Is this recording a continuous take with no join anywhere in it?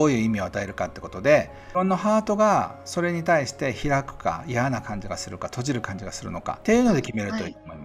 no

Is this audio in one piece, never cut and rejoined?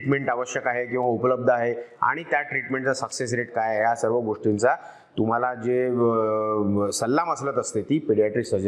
yes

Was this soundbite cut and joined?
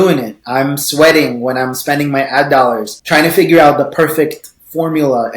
yes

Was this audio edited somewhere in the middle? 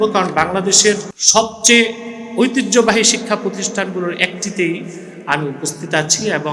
yes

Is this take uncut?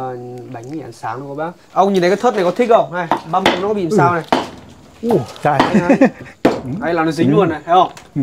no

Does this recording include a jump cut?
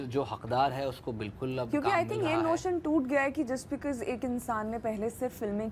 no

